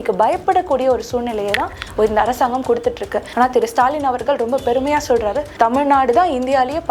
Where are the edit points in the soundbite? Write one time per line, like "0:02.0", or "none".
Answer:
0:03.2
0:05.4